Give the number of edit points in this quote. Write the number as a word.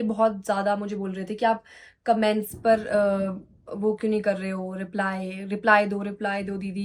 zero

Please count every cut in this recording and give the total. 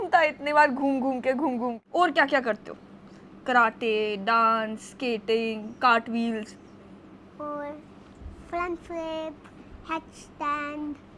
one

